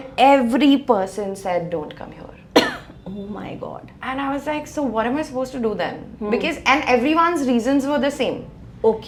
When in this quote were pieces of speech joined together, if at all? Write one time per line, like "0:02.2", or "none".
none